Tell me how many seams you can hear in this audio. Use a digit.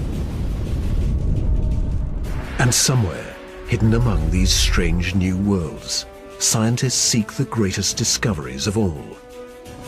0